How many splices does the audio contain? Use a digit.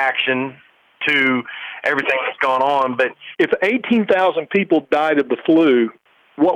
1